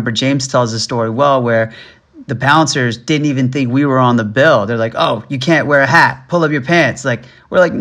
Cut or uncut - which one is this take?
uncut